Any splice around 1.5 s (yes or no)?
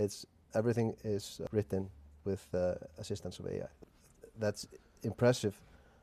yes